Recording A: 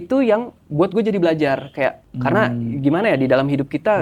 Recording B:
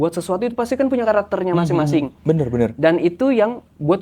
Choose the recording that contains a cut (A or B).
A